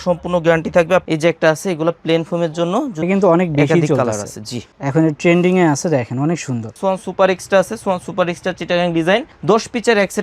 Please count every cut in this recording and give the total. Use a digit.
3